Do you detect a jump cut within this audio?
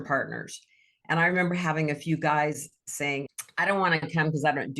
yes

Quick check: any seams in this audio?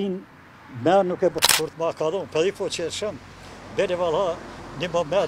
yes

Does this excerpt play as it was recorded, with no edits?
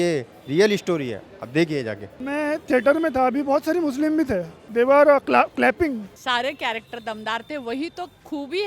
no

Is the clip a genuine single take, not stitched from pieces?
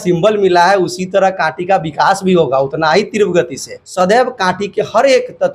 no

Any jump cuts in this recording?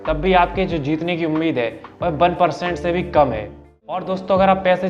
yes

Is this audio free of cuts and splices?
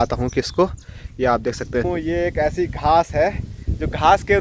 no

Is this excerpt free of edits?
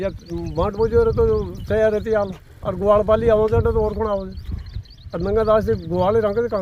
yes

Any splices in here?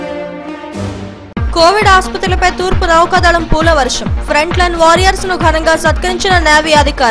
yes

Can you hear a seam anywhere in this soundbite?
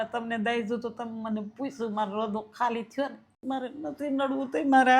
yes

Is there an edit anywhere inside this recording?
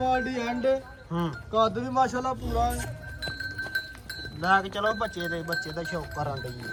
no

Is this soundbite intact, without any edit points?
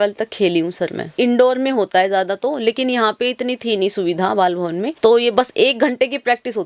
no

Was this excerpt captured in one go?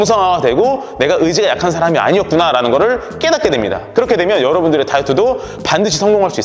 yes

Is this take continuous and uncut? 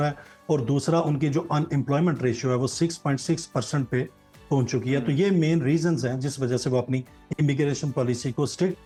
yes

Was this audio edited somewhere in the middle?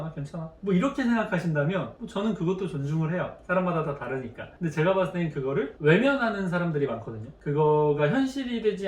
no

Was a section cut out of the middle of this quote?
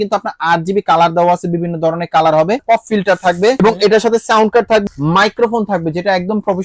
yes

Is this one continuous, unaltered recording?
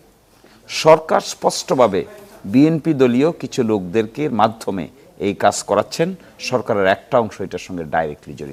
yes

